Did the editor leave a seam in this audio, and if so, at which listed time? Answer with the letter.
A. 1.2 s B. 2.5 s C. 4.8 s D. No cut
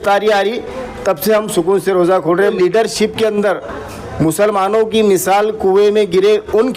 B